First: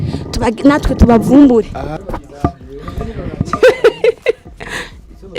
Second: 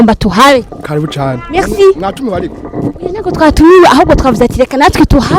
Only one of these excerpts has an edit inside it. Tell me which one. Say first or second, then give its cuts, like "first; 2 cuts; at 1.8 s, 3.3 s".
first; 1 cut; at 1.9 s